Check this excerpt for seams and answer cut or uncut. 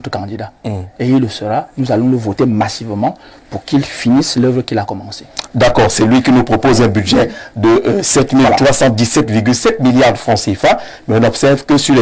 uncut